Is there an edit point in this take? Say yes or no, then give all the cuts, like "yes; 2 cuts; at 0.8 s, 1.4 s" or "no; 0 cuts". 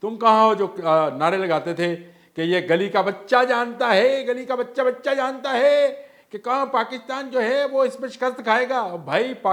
no; 0 cuts